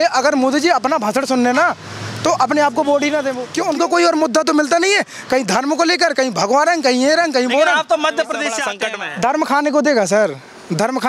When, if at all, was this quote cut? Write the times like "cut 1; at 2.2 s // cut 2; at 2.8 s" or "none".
cut 1; at 3.4 s // cut 2; at 8.7 s

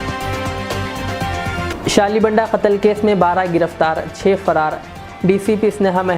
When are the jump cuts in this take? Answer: none

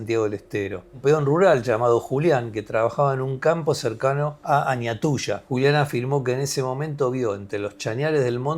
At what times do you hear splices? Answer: cut 1; at 1.0 s // cut 2; at 4.4 s // cut 3; at 5.4 s

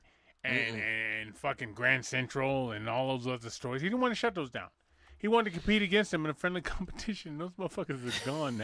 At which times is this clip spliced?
cut 1; at 1.2 s

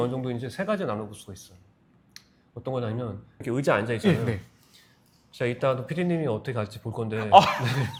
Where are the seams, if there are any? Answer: none

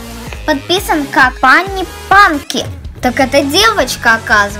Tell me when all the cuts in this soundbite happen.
cut 1; at 1.3 s

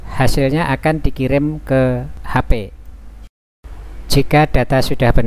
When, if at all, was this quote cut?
cut 1; at 2.2 s

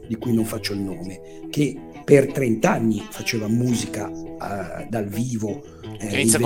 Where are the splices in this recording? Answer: none

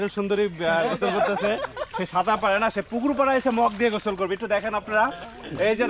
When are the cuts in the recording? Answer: none

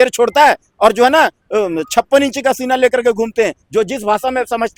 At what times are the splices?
none

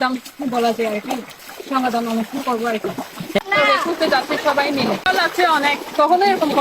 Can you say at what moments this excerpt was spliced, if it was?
cut 1; at 3.4 s // cut 2; at 5.0 s

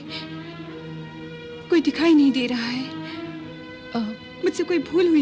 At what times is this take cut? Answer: cut 1; at 4.3 s

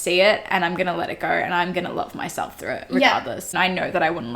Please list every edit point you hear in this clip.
cut 1; at 3.5 s

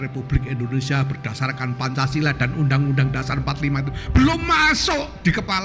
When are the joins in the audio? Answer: none

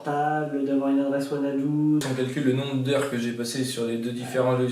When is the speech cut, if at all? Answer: cut 1; at 2.1 s

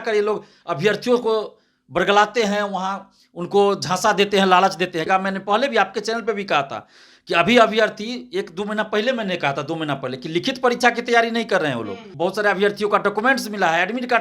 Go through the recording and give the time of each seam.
cut 1; at 5.1 s // cut 2; at 12.1 s

